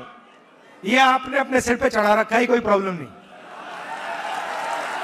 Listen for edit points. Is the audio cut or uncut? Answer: uncut